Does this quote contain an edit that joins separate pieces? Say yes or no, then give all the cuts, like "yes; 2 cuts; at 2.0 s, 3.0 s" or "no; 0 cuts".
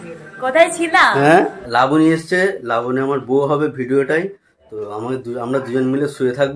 yes; 1 cut; at 1.6 s